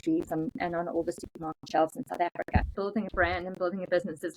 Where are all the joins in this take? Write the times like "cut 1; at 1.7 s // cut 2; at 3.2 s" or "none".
cut 1; at 2.7 s